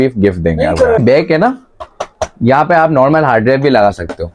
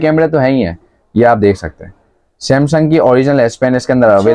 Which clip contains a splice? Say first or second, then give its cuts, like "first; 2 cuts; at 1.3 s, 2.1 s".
first; 1 cut; at 1.0 s